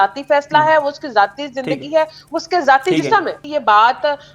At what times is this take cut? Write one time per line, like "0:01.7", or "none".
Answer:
0:03.4